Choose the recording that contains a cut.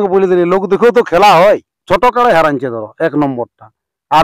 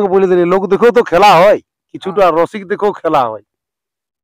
first; 1 cut; at 1.8 s

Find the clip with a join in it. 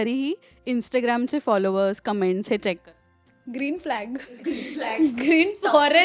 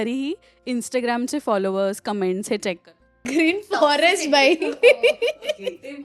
second; 1 cut; at 3.2 s

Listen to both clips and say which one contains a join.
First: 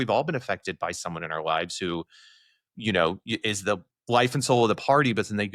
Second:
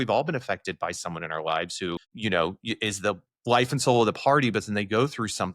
second; 1 cut; at 2.1 s

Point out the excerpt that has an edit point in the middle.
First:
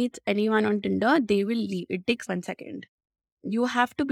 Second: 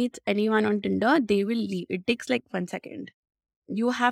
first; 1 cut; at 2.2 s

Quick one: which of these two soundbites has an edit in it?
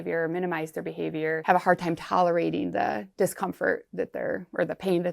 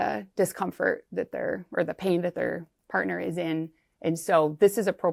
first; 1 cut; at 1.4 s

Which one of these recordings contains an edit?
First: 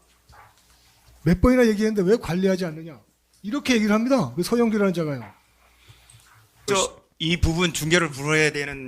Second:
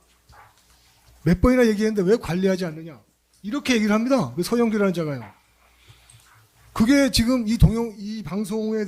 first; 1 cut; at 6.7 s

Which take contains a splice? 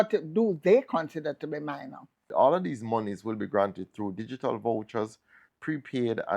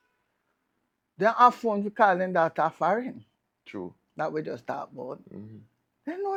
first; 1 cut; at 2.2 s

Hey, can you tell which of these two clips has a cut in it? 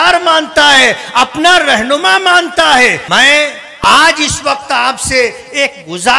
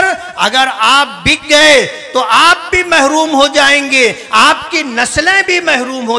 first; 1 cut; at 3.0 s

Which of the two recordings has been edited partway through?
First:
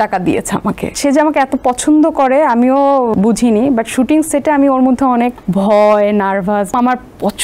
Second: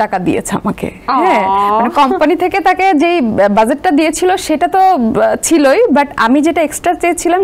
first; 4 cuts; at 0.9 s, 3.1 s, 5.4 s, 6.7 s

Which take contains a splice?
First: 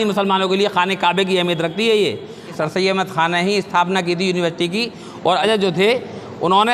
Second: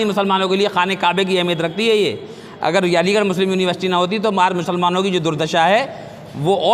first; 2 cuts; at 2.5 s, 5.4 s

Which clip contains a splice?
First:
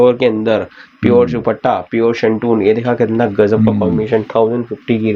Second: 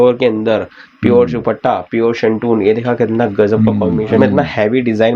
second; 1 cut; at 4.2 s

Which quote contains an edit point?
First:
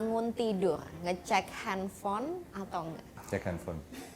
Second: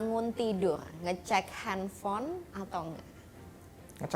first; 1 cut; at 3.2 s

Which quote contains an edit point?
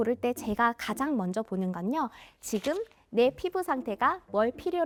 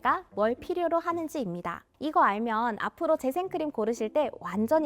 second; 1 cut; at 1.9 s

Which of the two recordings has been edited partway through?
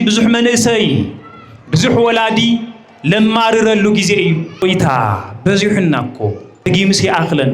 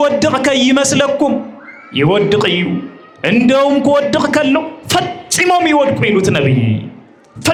first; 2 cuts; at 4.6 s, 6.7 s

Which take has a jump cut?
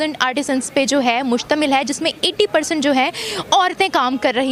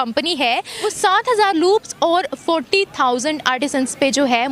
second; 1 cut; at 1.0 s

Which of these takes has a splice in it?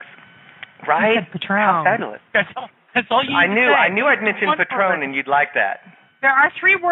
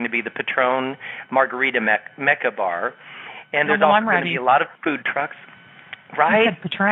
second; 1 cut; at 4.3 s

